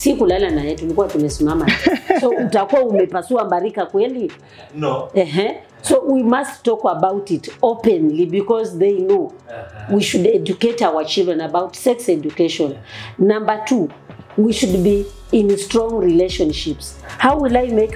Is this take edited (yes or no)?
no